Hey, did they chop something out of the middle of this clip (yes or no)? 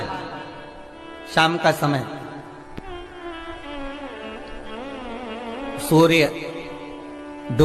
no